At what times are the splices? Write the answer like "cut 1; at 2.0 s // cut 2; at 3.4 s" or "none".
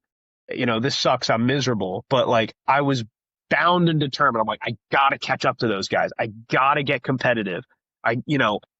none